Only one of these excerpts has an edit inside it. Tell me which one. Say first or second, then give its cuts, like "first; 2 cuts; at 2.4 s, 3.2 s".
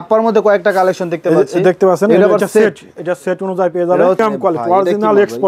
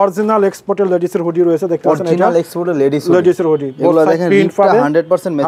first; 1 cut; at 4.2 s